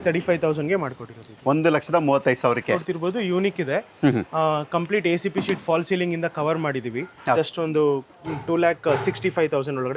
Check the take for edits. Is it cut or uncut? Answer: cut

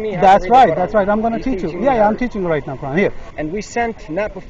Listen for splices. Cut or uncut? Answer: cut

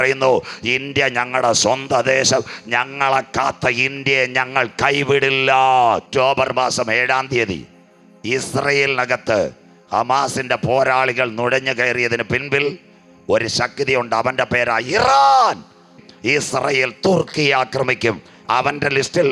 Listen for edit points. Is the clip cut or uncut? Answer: cut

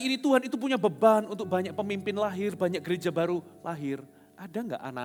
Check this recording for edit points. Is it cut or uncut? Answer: uncut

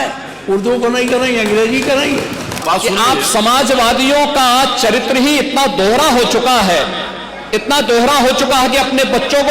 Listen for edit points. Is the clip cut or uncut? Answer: cut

